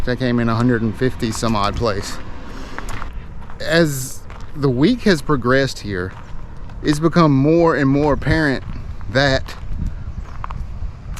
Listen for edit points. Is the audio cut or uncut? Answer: cut